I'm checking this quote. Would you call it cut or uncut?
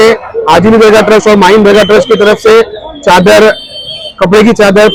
uncut